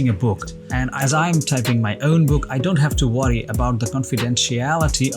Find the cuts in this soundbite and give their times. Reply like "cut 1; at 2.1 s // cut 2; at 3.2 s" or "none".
cut 1; at 0.9 s